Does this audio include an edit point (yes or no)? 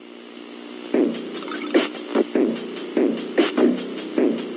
no